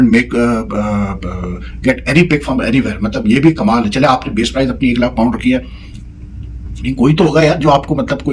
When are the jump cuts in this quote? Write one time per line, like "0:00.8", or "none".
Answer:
none